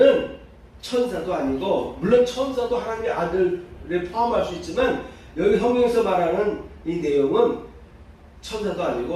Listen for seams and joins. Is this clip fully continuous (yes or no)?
yes